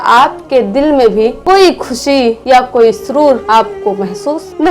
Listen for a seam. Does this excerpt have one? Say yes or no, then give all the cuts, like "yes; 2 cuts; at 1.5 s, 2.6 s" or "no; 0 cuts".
no; 0 cuts